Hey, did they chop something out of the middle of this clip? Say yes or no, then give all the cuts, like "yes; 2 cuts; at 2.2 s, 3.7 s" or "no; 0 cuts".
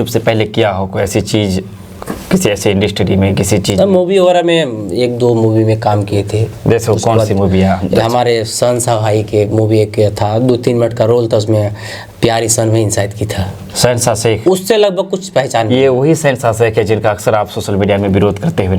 no; 0 cuts